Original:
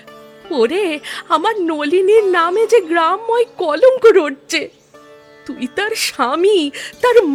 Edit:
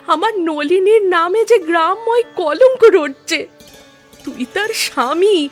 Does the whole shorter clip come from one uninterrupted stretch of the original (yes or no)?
yes